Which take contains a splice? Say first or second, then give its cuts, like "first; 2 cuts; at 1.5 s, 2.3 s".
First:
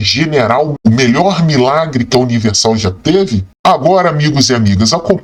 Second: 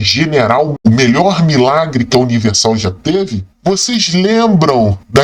second; 1 cut; at 3.4 s